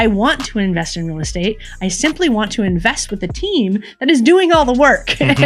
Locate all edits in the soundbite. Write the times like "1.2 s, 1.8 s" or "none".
none